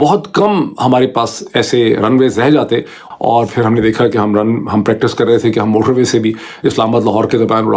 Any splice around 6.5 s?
no; 1 cut; at 3.0 s

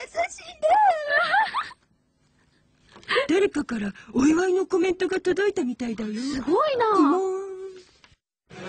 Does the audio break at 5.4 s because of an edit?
no; 1 cut; at 3.3 s

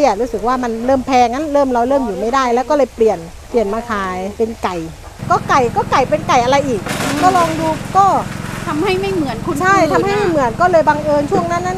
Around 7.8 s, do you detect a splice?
no; 3 cuts; at 3.3 s, 4.3 s, 5.1 s

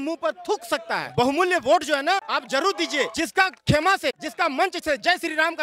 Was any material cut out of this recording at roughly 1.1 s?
yes; 4 cuts; at 1.1 s, 2.3 s, 3.1 s, 4.2 s

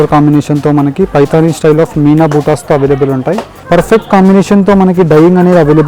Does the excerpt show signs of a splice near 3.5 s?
yes; 1 cut; at 3.5 s

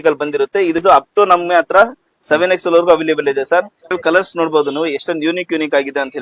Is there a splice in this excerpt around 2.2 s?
no; 2 cuts; at 0.8 s, 4.0 s

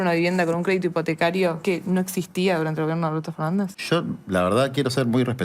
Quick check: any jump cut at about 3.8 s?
yes; 2 cuts; at 1.6 s, 3.8 s

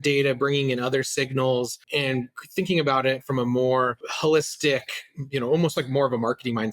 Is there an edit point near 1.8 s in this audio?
yes; 2 cuts; at 1.8 s, 4.1 s

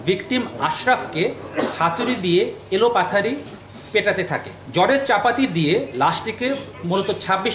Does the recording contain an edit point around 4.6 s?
yes; 1 cut; at 4.6 s

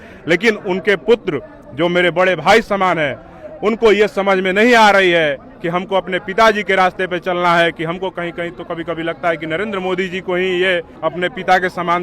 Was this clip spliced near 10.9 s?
yes; 1 cut; at 10.9 s

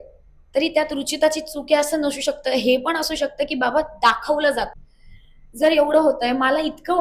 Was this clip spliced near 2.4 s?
no; 1 cut; at 4.8 s

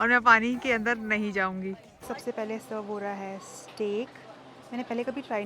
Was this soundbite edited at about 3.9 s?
no; 1 cut; at 1.9 s

